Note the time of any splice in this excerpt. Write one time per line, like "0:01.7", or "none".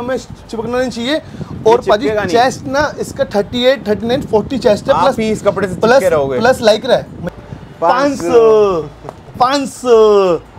0:07.2